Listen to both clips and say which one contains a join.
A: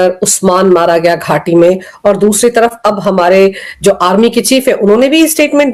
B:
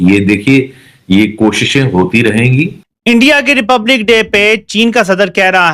B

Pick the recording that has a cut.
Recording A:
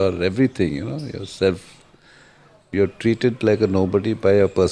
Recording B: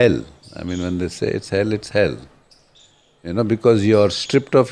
A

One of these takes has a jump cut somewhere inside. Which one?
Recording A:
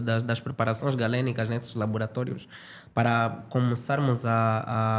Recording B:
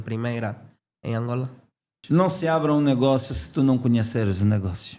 B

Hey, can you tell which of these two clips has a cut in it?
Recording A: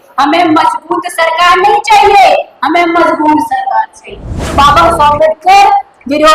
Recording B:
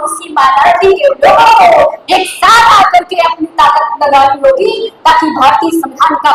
A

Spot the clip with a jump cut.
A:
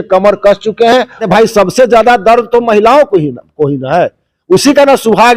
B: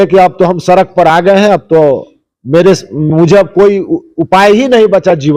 A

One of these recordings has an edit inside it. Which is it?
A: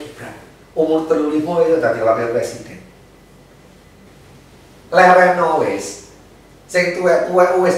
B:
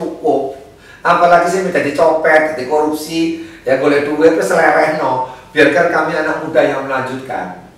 A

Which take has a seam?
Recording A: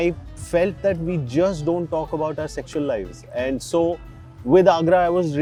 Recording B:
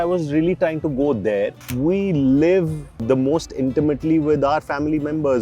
B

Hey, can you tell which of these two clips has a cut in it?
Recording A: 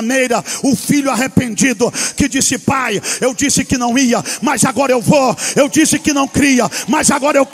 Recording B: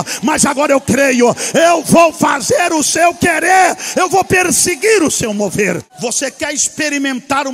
B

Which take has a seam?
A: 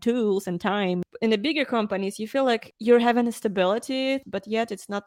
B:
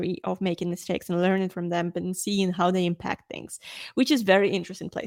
A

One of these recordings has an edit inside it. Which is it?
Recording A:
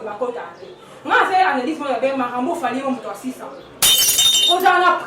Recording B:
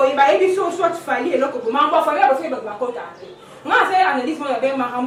A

